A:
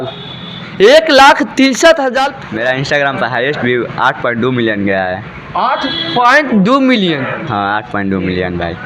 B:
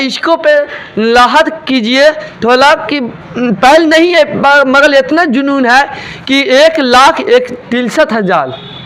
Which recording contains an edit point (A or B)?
A